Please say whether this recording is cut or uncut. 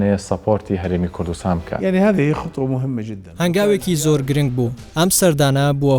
cut